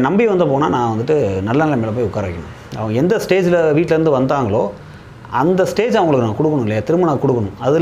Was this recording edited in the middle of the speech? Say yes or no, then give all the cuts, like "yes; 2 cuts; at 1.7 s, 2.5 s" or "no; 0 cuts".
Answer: no; 0 cuts